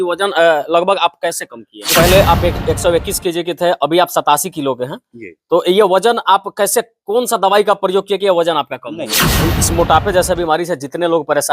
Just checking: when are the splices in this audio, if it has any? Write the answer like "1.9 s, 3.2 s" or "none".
1.8 s, 9.4 s